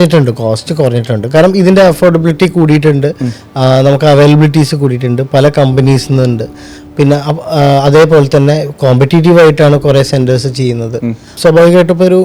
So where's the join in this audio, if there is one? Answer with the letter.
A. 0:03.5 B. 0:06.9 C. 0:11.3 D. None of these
C